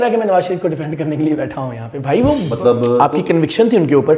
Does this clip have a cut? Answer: yes; 1 cut; at 2.5 s

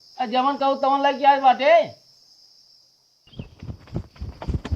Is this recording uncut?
no; 1 cut; at 3.2 s

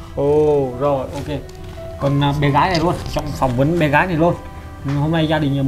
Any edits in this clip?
no; 0 cuts

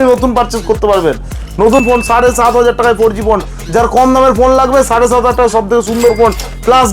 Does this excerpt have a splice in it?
yes; 1 cut; at 1.8 s

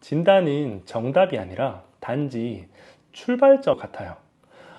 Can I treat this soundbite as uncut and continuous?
no; 1 cut; at 3.8 s

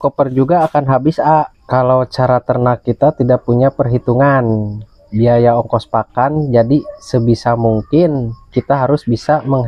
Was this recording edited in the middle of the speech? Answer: yes; 1 cut; at 1.6 s

